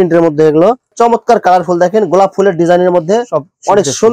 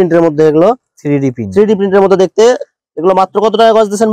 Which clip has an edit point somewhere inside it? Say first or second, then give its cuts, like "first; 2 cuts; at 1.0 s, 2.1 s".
first; 1 cut; at 0.9 s